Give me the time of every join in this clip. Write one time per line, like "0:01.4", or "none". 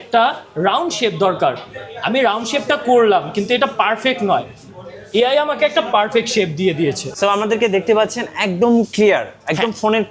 0:07.1